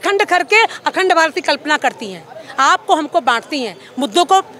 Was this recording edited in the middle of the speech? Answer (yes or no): no